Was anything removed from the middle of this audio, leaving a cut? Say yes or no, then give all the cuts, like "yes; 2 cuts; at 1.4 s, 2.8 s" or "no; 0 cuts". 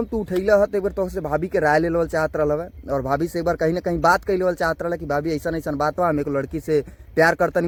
no; 0 cuts